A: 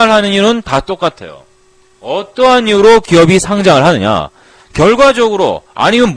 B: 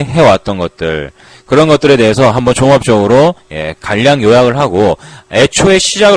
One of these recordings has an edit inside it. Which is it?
A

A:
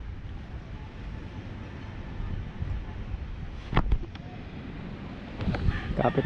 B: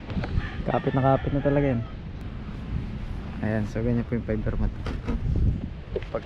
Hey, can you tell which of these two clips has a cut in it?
B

